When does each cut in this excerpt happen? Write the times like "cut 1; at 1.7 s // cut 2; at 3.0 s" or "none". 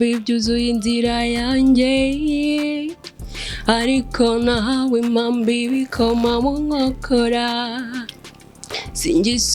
none